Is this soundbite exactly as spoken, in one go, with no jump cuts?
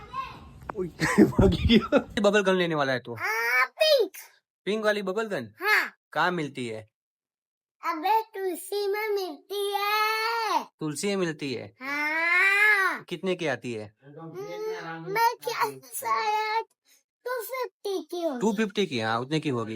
no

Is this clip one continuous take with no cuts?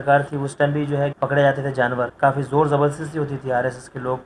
no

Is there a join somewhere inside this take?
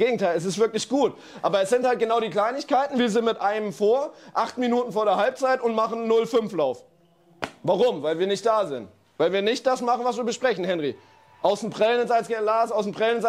no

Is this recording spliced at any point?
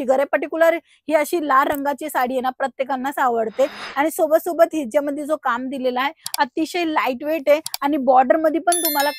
no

